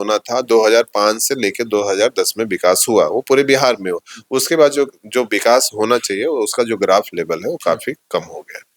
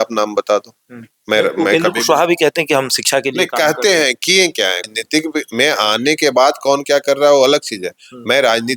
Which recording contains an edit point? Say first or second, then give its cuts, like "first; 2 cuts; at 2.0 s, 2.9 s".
second; 1 cut; at 4.8 s